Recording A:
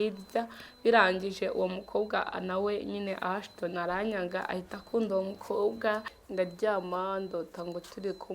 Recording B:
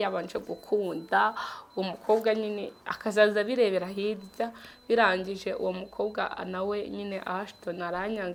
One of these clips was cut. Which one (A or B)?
A